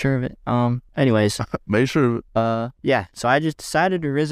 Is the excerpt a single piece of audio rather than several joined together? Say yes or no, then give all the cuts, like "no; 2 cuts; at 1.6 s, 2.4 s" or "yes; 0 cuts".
no; 2 cuts; at 0.8 s, 2.4 s